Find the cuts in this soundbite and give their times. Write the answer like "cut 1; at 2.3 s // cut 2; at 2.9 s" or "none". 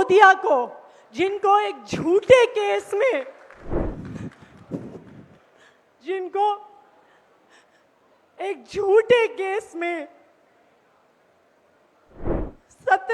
cut 1; at 3.8 s

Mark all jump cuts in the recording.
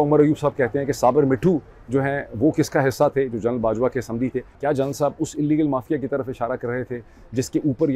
cut 1; at 4.5 s

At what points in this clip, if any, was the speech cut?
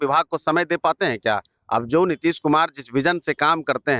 none

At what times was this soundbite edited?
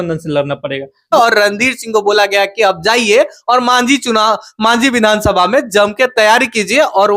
cut 1; at 1.1 s

